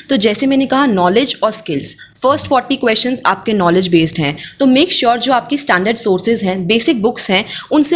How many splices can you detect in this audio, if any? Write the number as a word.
zero